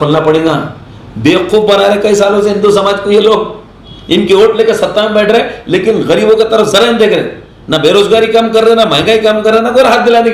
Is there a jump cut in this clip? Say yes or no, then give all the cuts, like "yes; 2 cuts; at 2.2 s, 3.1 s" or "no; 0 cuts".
no; 0 cuts